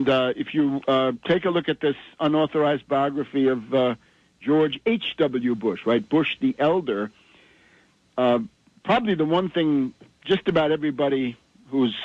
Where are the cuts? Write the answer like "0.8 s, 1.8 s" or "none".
none